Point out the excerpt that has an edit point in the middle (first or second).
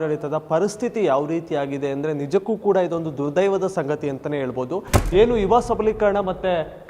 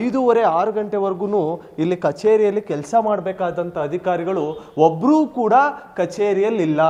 first